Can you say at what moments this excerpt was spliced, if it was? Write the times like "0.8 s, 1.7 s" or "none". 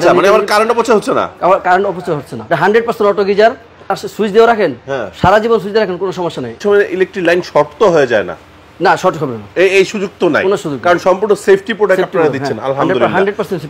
4.0 s, 6.6 s